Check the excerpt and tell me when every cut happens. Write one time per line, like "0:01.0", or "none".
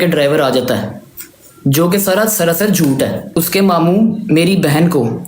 0:03.2